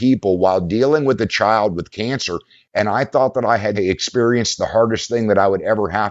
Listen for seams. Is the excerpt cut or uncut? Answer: uncut